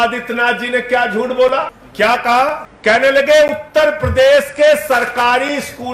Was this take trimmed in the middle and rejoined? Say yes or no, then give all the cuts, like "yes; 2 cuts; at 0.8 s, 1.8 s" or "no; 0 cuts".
yes; 2 cuts; at 1.8 s, 2.7 s